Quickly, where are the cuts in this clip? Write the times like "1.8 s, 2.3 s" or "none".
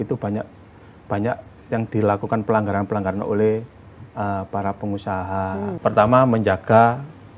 5.7 s